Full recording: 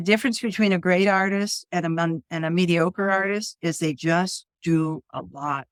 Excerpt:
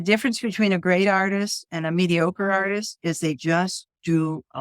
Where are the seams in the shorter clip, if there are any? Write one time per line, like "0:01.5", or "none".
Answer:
0:01.6